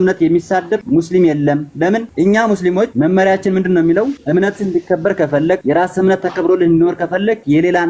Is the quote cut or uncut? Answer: cut